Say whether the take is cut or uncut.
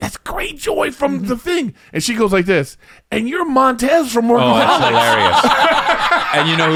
uncut